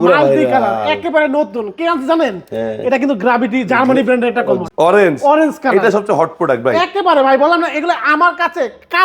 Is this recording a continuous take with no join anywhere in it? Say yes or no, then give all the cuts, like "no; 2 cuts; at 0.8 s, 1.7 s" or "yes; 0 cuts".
no; 1 cut; at 4.6 s